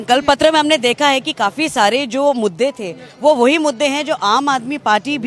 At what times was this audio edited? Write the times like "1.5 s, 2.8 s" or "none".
none